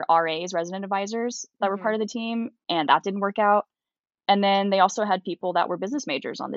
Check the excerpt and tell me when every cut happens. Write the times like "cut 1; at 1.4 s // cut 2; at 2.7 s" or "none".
none